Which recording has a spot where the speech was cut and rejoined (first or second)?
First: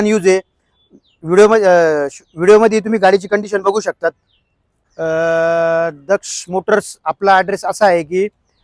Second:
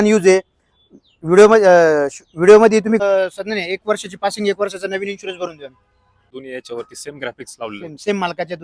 second